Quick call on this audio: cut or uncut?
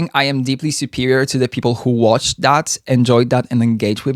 uncut